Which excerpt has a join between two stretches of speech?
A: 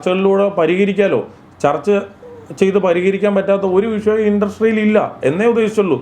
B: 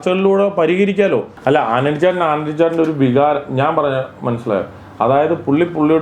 B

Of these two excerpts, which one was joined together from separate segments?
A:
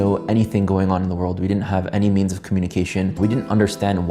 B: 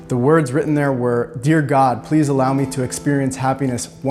A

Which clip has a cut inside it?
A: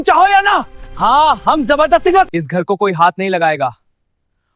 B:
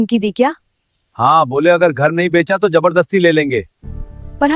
A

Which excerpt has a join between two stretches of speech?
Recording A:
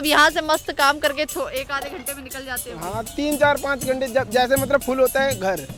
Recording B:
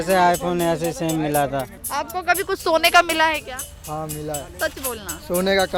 B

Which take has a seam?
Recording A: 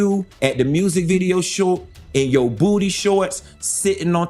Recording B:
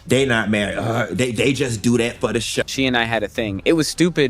B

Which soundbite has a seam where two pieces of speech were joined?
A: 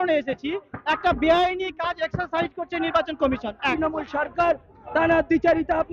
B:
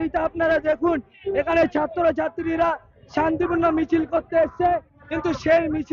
A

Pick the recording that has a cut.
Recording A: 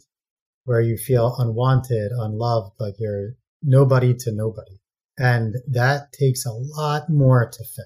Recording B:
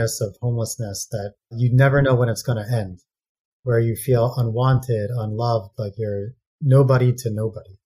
B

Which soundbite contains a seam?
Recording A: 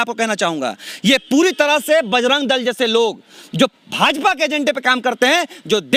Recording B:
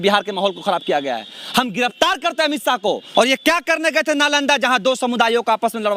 B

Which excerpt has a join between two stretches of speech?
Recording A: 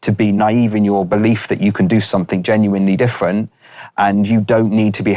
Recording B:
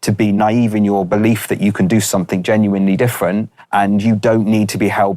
B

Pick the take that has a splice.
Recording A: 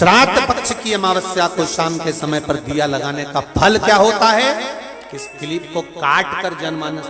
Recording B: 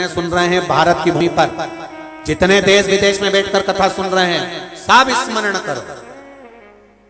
B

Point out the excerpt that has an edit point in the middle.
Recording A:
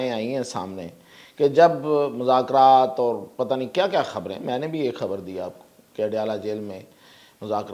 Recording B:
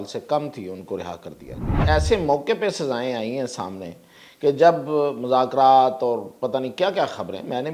B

